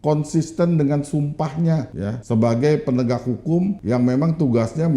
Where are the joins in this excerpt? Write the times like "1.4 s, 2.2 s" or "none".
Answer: 2.1 s, 3.8 s